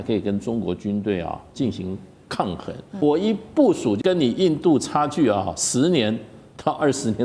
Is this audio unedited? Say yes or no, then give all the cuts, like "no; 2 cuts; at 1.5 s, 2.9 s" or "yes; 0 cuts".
no; 2 cuts; at 3.0 s, 4.0 s